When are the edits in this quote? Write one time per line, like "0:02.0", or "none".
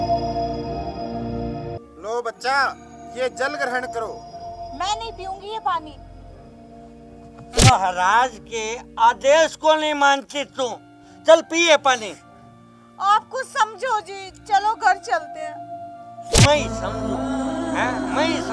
0:01.8